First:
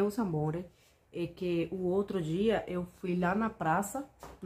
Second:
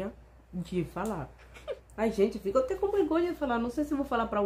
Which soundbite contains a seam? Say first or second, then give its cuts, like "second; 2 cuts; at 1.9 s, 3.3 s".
second; 1 cut; at 1.8 s